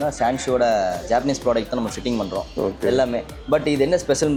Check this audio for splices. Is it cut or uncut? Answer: uncut